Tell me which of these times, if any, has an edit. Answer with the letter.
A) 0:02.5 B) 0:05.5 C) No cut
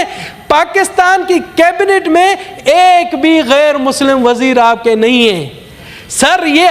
C